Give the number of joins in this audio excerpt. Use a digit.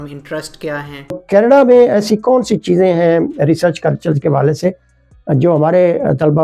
1